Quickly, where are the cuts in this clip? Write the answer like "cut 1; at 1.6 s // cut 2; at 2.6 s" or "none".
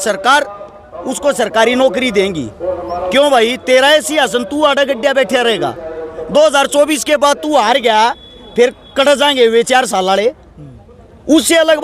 none